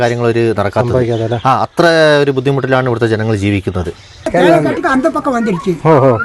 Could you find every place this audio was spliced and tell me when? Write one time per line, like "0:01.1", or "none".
0:04.3